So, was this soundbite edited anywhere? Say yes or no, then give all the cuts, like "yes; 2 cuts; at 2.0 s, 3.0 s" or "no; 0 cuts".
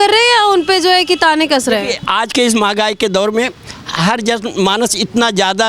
no; 0 cuts